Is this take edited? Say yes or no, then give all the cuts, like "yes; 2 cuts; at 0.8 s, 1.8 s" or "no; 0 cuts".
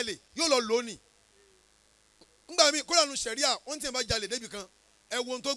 no; 0 cuts